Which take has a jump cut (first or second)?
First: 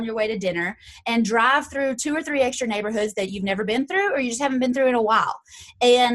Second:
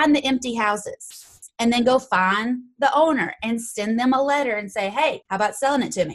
second